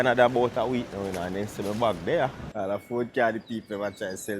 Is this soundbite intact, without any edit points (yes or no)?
no